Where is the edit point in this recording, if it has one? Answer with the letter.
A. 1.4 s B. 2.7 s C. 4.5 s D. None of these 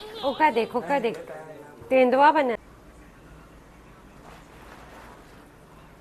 B